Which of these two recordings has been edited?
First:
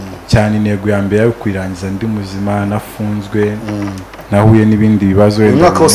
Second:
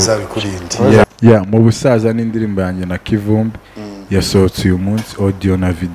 second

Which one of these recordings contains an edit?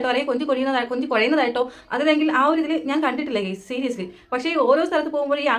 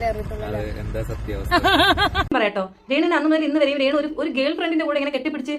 second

